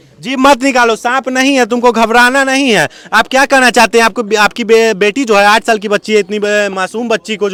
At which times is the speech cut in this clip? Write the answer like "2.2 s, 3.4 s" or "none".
none